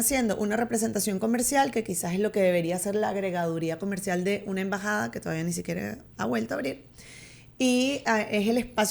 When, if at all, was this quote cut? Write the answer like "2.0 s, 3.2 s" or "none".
none